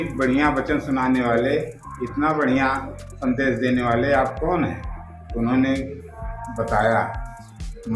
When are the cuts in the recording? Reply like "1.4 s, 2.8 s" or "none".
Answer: none